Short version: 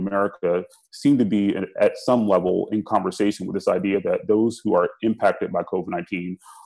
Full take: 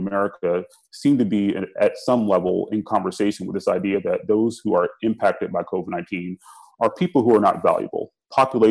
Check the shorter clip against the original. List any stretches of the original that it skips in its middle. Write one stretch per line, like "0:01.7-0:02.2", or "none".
none